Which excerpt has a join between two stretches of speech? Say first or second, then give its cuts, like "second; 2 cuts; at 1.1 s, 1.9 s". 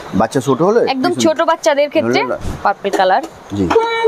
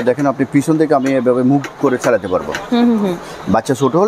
first; 1 cut; at 2.4 s